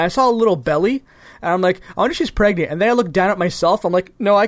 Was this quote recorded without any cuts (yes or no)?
yes